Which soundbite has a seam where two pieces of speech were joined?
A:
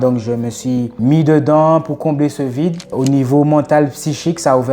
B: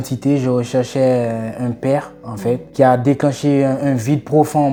A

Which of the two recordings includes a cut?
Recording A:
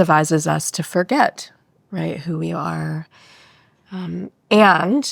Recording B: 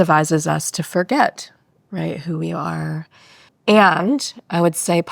B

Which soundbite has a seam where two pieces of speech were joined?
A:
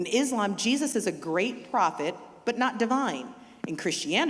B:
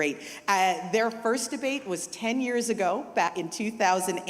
B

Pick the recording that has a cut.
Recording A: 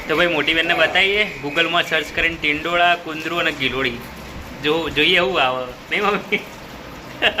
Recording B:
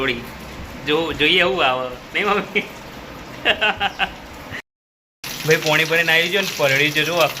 B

